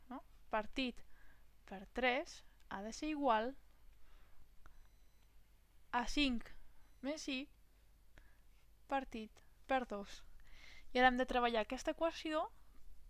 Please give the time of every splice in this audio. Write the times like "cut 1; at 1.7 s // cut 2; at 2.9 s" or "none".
cut 1; at 4.5 s